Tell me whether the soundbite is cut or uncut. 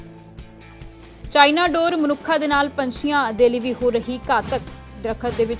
cut